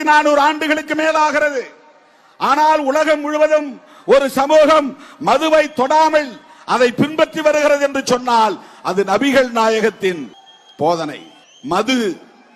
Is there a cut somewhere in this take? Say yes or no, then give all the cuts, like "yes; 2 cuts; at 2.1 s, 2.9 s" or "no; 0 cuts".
no; 0 cuts